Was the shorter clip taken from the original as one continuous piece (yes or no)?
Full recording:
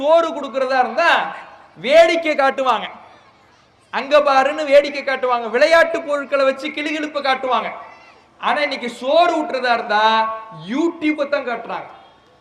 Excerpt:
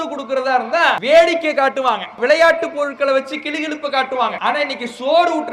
no